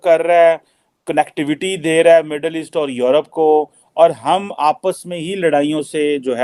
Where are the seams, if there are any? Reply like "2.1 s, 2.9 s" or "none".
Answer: none

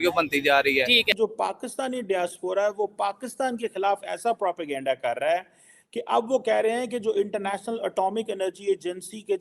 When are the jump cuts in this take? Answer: 1.1 s

